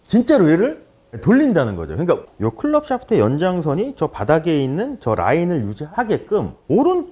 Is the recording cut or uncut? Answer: cut